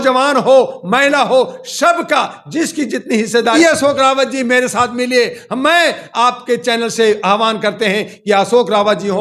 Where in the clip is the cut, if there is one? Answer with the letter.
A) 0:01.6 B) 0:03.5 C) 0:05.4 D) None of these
B